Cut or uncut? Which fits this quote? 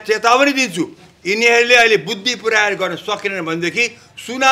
uncut